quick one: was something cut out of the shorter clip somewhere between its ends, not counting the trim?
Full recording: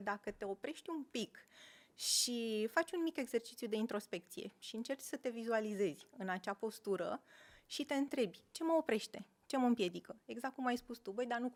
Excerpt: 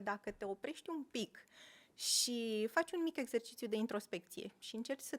no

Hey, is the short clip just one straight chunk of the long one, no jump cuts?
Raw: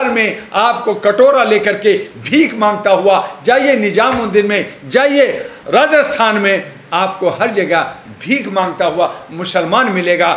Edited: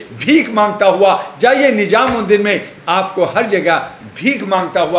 no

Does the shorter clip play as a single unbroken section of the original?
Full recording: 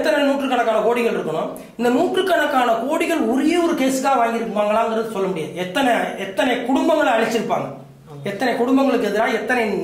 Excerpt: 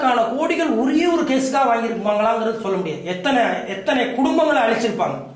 yes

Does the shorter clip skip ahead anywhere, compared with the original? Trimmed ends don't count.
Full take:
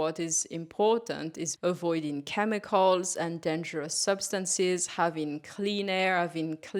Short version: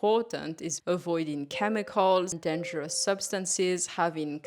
yes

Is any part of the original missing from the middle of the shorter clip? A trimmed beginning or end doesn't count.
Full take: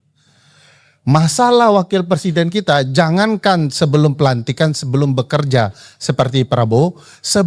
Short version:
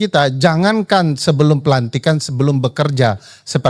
no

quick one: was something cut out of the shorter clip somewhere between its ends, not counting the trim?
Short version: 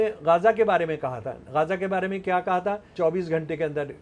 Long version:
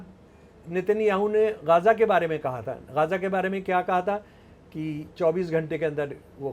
yes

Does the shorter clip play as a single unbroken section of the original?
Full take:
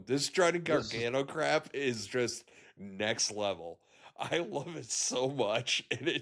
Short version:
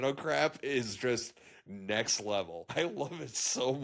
no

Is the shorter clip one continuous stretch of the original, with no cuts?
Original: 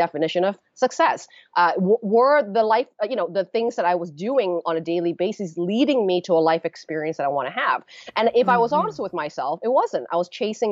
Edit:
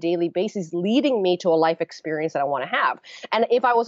yes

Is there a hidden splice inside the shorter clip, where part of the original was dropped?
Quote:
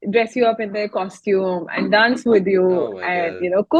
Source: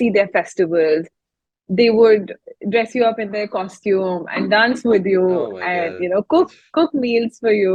no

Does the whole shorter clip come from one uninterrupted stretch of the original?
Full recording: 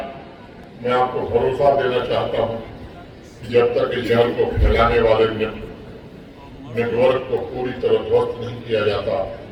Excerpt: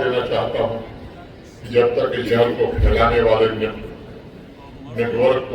yes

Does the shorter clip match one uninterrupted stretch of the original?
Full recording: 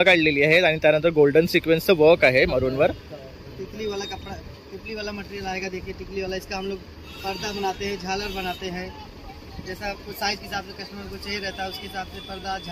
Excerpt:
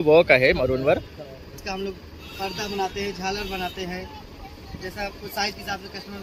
no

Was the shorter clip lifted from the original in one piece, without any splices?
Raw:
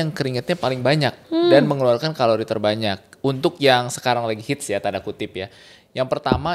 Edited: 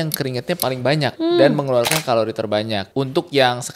no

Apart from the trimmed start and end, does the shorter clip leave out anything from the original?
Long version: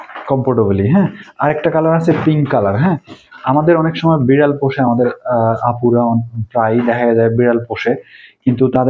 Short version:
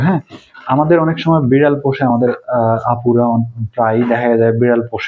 no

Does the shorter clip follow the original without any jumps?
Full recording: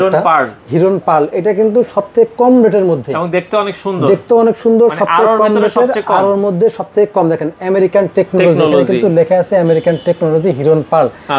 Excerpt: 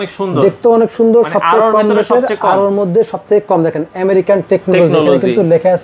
yes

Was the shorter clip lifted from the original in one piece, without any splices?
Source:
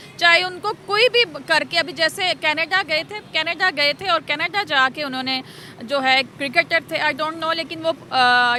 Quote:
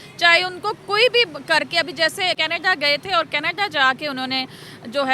no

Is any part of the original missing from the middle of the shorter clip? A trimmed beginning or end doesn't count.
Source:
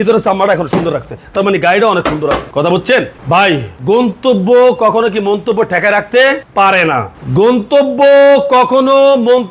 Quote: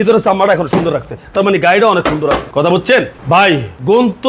no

